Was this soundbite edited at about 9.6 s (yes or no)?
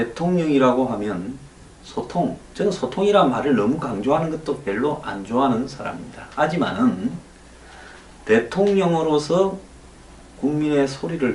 no